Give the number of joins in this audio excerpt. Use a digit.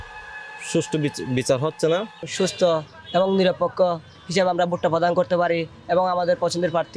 1